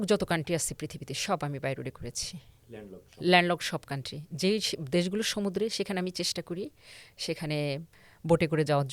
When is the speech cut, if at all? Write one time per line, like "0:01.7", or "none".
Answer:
none

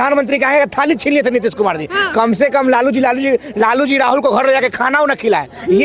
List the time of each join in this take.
none

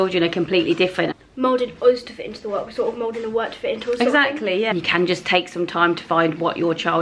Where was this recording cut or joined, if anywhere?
0:01.1
0:04.7

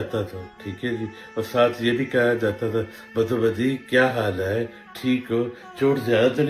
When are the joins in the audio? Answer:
none

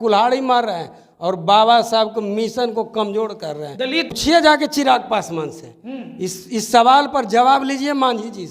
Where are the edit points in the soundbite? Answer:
0:04.2

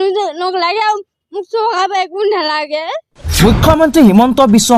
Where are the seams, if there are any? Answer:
0:03.2

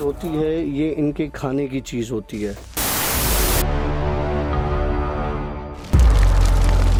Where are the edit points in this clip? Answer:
none

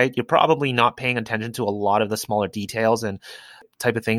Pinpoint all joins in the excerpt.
none

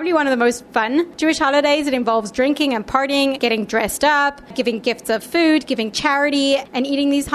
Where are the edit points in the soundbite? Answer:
0:01.1

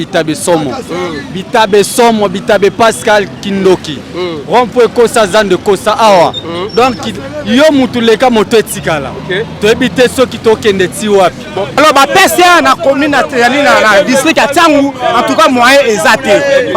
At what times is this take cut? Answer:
0:11.8

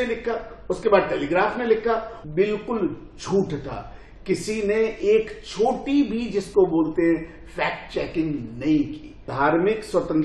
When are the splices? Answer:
0:02.1
0:09.2

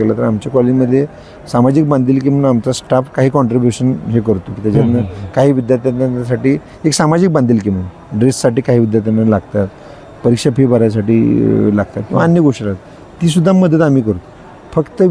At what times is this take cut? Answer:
none

